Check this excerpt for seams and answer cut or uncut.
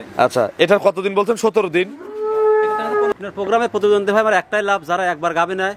cut